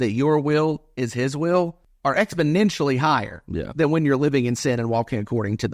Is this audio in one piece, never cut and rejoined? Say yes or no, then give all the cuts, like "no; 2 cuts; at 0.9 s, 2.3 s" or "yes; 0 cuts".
no; 1 cut; at 1.9 s